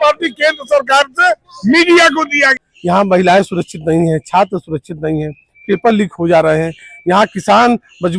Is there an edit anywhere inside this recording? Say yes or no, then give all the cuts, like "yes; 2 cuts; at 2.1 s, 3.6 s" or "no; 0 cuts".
yes; 1 cut; at 2.4 s